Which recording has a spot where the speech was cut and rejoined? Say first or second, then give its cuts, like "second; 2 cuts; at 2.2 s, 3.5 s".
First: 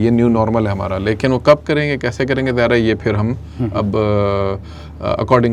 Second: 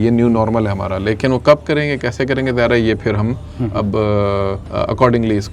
second; 1 cut; at 4.6 s